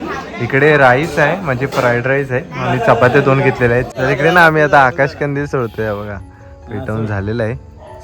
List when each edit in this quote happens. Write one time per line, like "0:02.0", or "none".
0:03.9